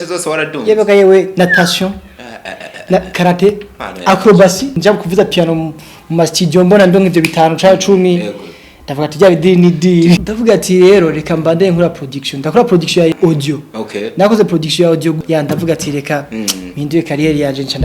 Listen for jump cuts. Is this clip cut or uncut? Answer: cut